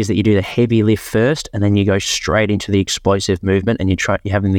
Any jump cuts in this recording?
no; 0 cuts

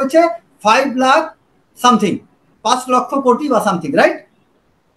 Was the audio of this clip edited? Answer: no; 0 cuts

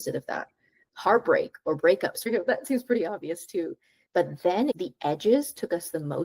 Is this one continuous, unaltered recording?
no; 1 cut; at 2.2 s

